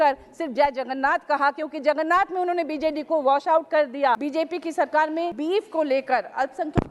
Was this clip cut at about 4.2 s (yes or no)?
yes